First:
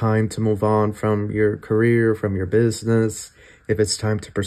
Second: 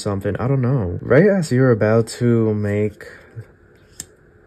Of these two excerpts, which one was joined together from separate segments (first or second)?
second